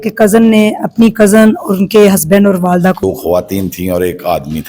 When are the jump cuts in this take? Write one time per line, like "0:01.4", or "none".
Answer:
0:03.0